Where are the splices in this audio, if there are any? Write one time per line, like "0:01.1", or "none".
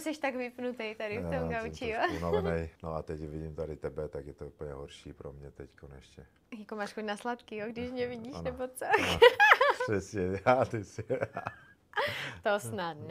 0:02.7